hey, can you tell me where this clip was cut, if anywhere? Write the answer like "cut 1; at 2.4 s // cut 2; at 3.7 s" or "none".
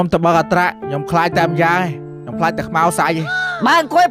none